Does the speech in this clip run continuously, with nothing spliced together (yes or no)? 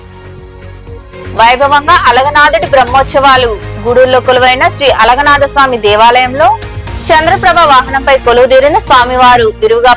yes